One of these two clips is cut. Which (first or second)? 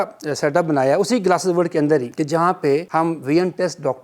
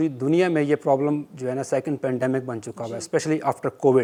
first